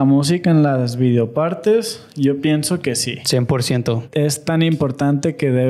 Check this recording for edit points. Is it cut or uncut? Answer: cut